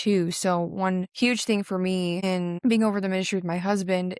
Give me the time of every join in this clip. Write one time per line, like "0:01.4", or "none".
0:01.1
0:02.2